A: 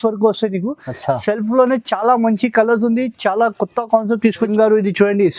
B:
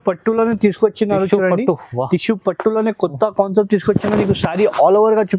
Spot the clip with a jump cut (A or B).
A